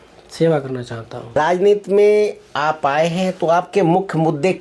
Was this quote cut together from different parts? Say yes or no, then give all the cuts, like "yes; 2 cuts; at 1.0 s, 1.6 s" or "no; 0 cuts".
yes; 2 cuts; at 1.4 s, 3.6 s